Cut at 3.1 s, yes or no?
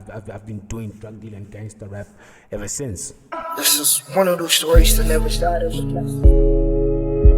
yes